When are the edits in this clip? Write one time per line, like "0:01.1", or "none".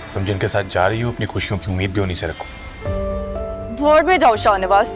0:02.6